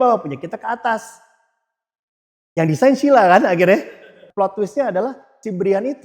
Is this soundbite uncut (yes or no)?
no